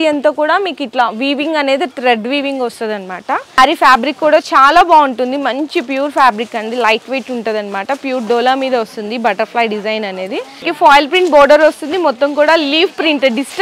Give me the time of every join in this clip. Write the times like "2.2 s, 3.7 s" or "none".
3.6 s, 10.7 s